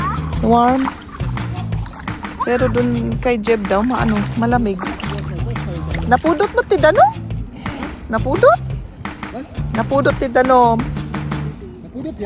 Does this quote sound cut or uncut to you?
uncut